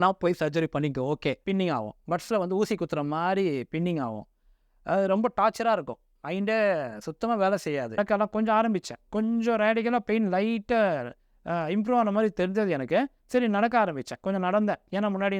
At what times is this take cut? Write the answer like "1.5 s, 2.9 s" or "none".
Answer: 1.4 s, 8.0 s